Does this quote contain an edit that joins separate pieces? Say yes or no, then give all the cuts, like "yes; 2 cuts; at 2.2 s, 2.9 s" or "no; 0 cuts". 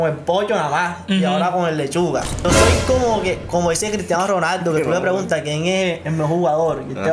yes; 1 cut; at 2.4 s